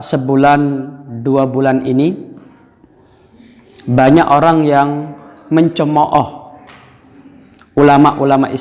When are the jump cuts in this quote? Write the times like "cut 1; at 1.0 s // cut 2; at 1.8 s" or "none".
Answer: none